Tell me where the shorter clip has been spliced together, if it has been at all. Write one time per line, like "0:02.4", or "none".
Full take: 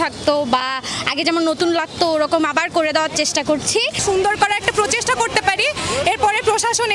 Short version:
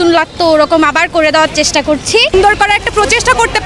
0:02.3